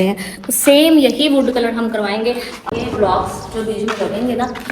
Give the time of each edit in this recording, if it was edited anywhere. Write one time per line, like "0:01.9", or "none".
0:02.6